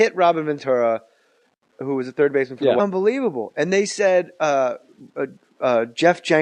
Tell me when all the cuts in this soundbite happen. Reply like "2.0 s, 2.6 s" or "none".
none